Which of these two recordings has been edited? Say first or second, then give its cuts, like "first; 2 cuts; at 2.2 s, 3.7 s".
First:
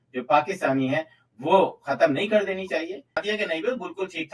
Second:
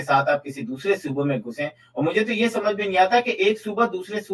first; 1 cut; at 3.2 s